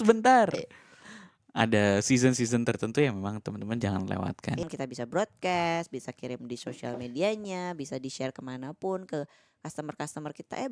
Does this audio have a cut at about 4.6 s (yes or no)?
yes